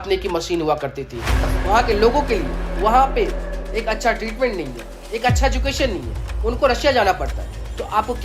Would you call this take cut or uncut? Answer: cut